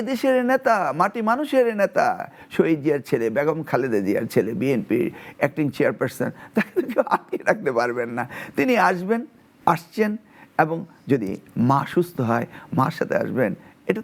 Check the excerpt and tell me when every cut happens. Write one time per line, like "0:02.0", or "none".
none